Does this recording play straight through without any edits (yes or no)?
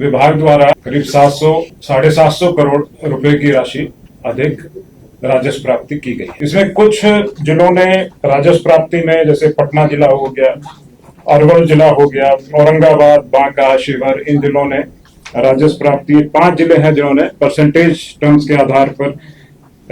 no